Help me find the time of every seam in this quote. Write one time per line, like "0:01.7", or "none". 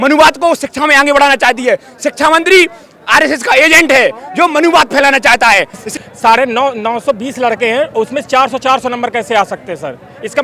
0:05.8